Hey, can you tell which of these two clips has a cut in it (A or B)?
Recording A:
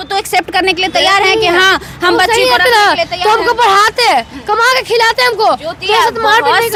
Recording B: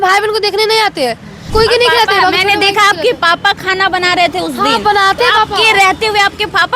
B